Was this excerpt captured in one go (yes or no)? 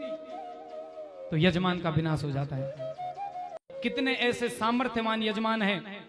no